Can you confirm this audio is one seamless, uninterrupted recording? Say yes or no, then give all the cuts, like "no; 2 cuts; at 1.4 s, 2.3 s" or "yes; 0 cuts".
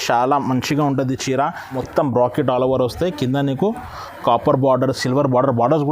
no; 1 cut; at 1.7 s